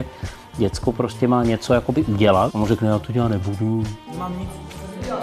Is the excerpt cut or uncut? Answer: cut